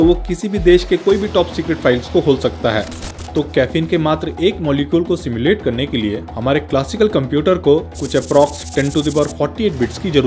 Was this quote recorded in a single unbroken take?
no; 1 cut; at 3.0 s

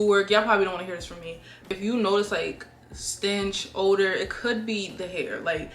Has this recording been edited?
yes; 1 cut; at 1.7 s

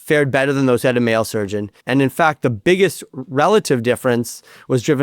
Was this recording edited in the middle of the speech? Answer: yes; 1 cut; at 1.7 s

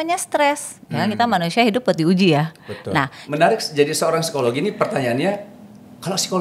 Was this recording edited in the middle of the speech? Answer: yes; 1 cut; at 3.2 s

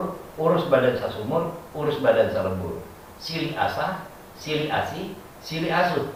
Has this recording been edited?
no; 0 cuts

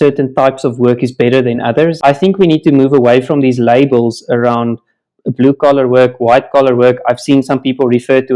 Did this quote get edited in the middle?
yes; 1 cut; at 2.0 s

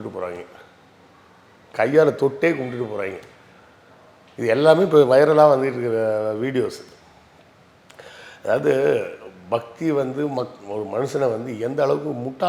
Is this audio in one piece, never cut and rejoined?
yes; 0 cuts

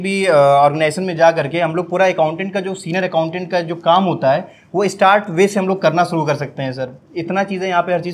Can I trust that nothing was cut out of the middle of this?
yes; 0 cuts

